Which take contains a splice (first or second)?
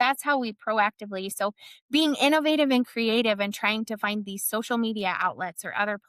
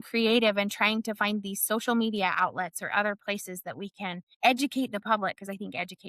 second